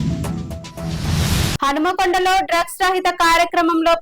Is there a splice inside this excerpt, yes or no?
yes